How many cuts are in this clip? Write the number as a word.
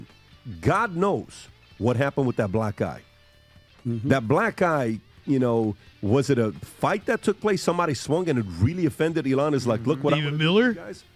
zero